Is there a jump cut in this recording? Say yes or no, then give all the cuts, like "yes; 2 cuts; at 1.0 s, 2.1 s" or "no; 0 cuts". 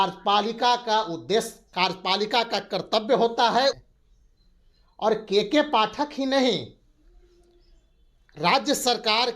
yes; 1 cut; at 3.8 s